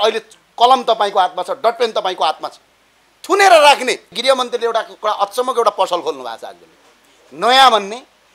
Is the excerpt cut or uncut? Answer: cut